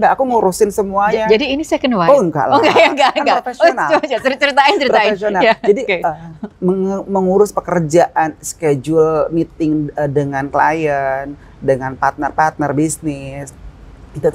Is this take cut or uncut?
uncut